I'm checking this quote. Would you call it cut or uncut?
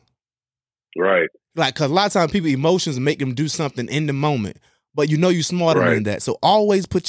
cut